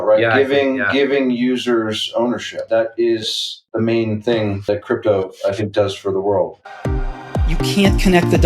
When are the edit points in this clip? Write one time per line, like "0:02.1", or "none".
0:02.6
0:03.6
0:04.6
0:06.6